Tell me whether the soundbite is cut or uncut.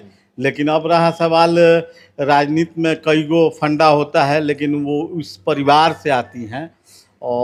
uncut